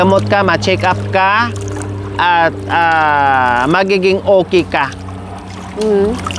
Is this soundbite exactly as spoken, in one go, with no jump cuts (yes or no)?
yes